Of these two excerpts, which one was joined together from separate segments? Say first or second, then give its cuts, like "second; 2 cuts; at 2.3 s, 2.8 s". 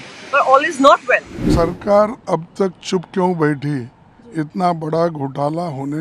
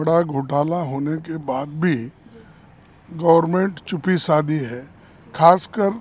first; 1 cut; at 1.5 s